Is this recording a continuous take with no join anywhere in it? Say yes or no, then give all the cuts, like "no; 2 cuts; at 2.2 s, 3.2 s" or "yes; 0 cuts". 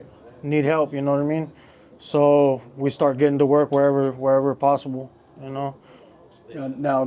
yes; 0 cuts